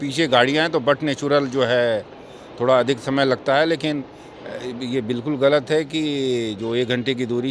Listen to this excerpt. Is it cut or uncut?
uncut